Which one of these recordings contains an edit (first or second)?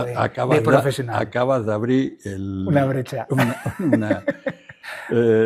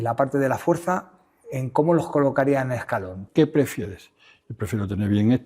second